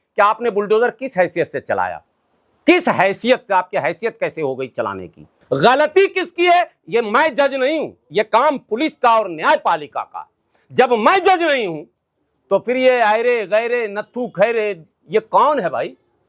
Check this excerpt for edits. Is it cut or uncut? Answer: cut